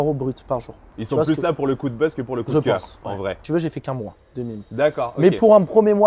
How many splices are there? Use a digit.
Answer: 2